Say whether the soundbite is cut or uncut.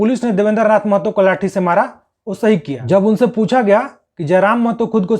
cut